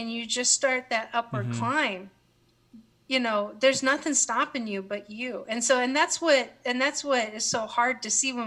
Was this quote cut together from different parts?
no; 0 cuts

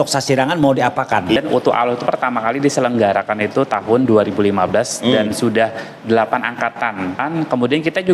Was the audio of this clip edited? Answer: yes; 2 cuts; at 1.4 s, 7.2 s

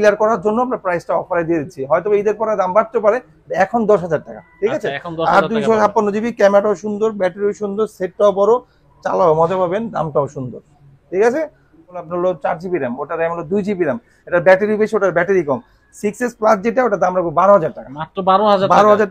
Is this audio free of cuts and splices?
no; 1 cut; at 12.1 s

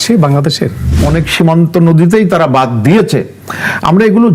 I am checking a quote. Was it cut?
yes; 1 cut; at 0.9 s

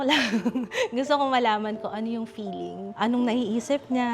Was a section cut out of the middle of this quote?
yes; 1 cut; at 3.0 s

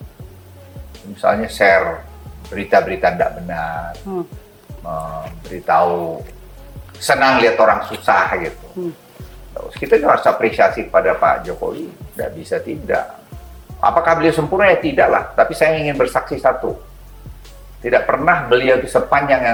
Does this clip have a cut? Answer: no; 0 cuts

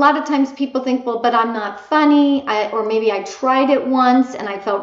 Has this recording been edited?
no; 0 cuts

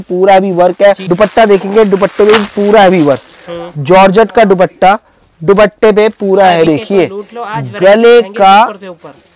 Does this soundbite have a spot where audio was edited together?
yes; 2 cuts; at 1.1 s, 6.7 s

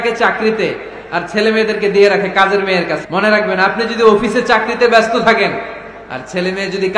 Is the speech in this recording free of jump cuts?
no; 1 cut; at 3.0 s

